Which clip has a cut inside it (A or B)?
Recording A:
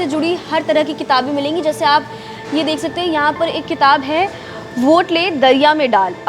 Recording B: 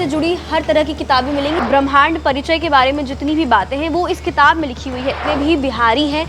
B